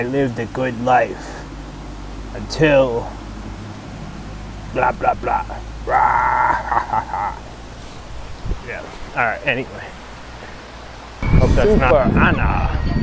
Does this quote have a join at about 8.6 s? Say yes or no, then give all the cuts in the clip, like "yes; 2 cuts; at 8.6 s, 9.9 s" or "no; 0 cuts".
no; 1 cut; at 11.4 s